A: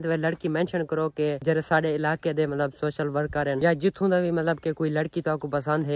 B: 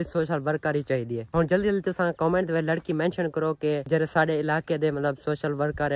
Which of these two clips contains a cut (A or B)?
B